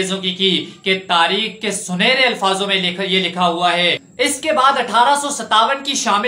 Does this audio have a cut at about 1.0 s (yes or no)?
no